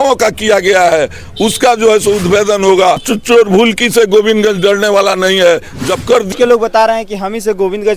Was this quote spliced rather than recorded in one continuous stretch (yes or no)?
yes